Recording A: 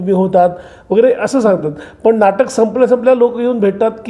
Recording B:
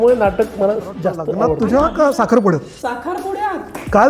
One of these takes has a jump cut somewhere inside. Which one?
B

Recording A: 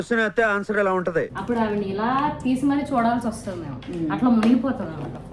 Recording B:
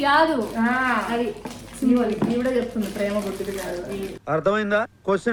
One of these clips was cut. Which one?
A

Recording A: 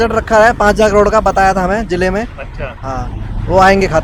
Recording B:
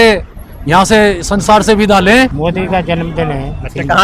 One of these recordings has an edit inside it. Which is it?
B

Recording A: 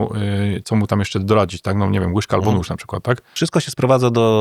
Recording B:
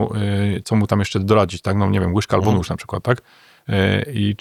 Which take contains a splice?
A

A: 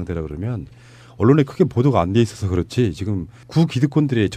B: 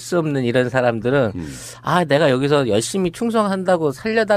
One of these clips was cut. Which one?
A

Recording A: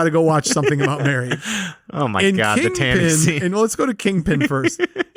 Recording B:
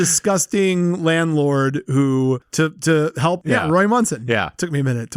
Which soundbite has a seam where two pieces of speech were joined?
B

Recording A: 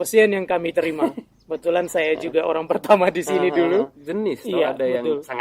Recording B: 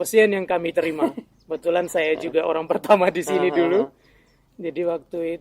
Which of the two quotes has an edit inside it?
A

